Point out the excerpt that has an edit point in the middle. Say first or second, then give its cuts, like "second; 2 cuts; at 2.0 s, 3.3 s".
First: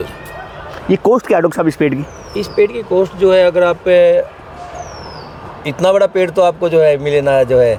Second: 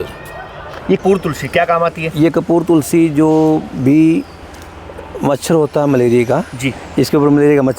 second; 1 cut; at 1.0 s